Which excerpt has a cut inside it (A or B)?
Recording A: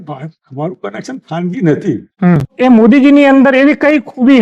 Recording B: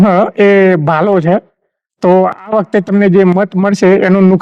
A